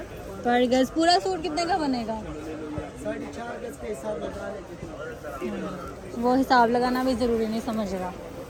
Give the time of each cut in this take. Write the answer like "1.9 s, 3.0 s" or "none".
none